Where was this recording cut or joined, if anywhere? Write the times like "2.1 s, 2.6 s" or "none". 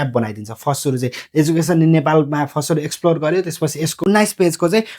3.9 s